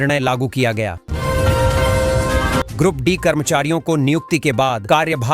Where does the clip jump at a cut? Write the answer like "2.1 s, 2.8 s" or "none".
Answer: 1.0 s, 2.7 s